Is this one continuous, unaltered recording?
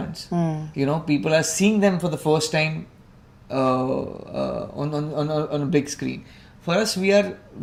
yes; 0 cuts

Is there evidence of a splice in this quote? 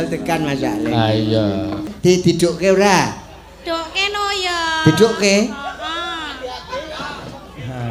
yes; 1 cut; at 1.9 s

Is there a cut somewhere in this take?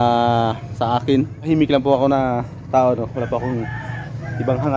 yes; 1 cut; at 1.4 s

